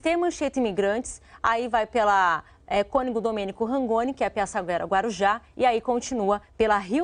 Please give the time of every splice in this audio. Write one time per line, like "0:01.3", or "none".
none